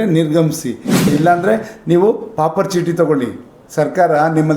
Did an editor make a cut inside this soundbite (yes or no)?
yes